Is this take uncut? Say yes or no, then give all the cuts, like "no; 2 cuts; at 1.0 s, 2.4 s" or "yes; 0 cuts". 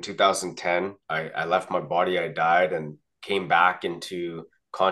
no; 1 cut; at 1.0 s